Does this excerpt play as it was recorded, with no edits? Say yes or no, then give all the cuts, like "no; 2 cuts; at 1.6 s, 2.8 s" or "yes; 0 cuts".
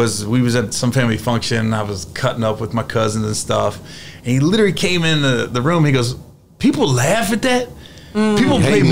yes; 0 cuts